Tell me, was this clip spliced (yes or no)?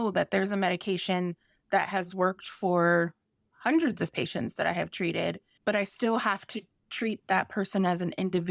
yes